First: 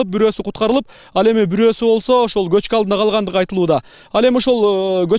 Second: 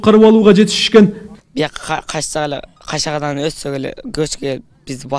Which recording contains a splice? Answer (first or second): second